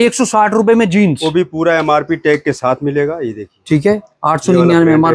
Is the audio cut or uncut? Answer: uncut